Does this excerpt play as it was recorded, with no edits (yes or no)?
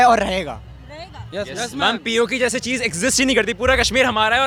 yes